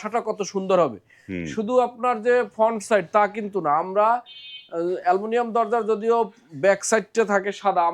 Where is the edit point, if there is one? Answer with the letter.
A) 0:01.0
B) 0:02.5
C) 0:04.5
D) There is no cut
D